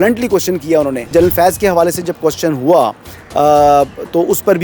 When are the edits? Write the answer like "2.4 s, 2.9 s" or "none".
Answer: 1.1 s